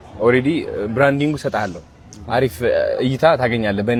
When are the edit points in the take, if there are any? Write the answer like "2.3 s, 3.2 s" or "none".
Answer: none